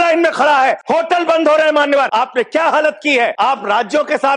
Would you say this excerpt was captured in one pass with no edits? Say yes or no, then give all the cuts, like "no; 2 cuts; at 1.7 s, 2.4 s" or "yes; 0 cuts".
no; 3 cuts; at 0.8 s, 2.1 s, 3.3 s